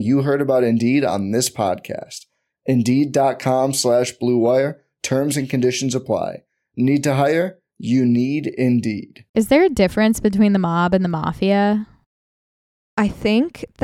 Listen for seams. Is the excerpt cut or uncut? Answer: cut